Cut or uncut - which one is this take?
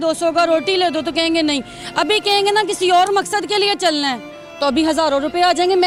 uncut